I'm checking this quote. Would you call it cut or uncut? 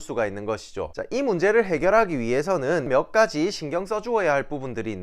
cut